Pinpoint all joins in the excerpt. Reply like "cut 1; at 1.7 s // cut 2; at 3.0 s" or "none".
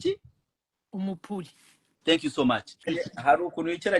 cut 1; at 2.9 s